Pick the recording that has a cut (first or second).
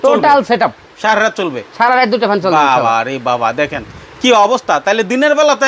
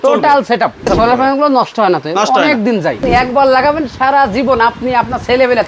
second